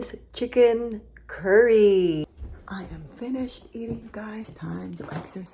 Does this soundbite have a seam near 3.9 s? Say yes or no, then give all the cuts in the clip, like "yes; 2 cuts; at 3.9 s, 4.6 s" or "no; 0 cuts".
no; 1 cut; at 2.2 s